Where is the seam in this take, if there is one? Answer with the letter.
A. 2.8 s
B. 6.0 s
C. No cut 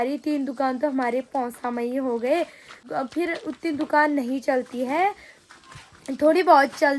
A